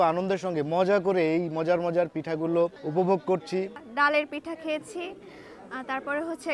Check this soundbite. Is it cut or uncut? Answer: cut